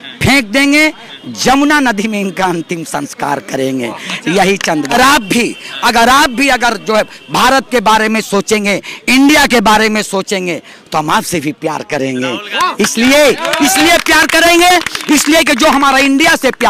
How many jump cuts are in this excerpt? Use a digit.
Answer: 1